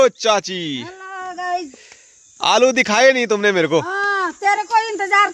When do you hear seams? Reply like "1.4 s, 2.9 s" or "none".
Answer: none